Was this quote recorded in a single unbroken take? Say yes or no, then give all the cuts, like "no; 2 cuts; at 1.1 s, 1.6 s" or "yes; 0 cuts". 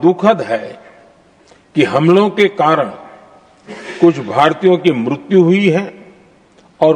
yes; 0 cuts